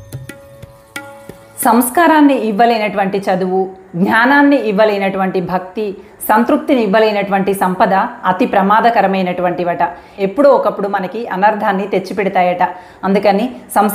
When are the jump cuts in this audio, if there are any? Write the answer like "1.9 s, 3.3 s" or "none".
1.6 s